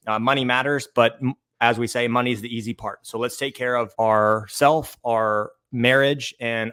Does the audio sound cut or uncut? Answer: uncut